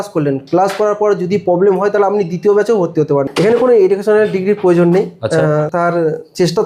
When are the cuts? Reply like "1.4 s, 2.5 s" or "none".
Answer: 3.3 s, 5.7 s